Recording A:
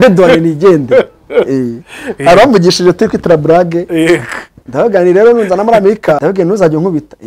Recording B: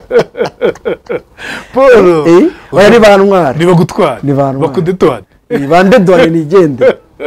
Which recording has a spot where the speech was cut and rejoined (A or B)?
A